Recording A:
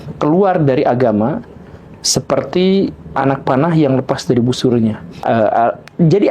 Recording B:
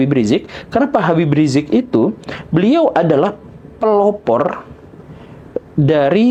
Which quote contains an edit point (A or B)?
A